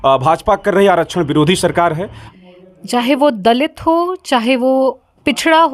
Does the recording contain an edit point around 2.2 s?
yes; 1 cut; at 2.2 s

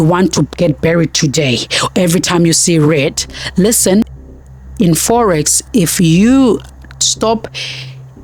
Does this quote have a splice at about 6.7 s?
no; 1 cut; at 4.0 s

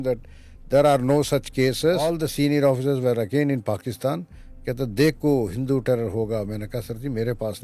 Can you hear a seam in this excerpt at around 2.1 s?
yes; 1 cut; at 2.1 s

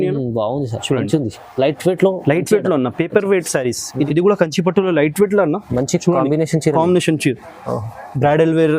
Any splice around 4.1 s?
yes; 1 cut; at 4.1 s

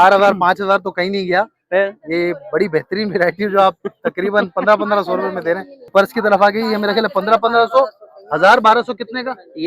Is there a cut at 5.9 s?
yes; 1 cut; at 5.9 s

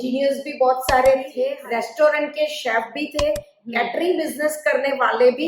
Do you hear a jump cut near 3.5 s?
no; 1 cut; at 1.4 s

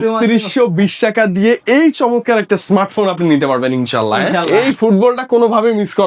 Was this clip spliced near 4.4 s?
yes; 1 cut; at 4.4 s

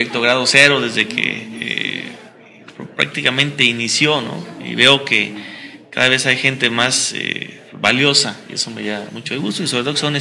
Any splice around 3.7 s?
no; 0 cuts

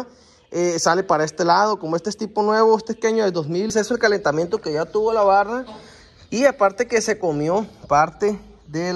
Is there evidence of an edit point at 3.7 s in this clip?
yes; 1 cut; at 3.7 s

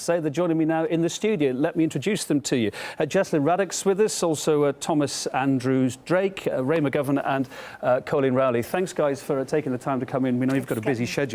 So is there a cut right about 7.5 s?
yes; 1 cut; at 7.5 s

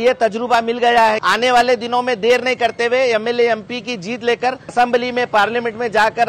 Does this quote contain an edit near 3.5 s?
no; 2 cuts; at 1.2 s, 4.7 s

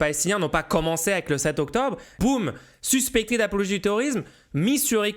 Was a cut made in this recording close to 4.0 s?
no; 1 cut; at 2.2 s

